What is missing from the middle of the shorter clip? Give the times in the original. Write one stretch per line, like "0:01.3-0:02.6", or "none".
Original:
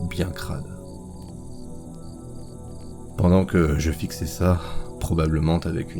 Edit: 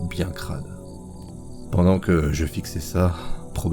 0:01.6-0:03.1